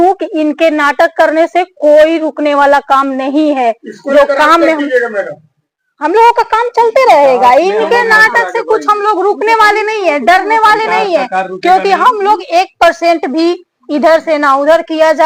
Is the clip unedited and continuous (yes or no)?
yes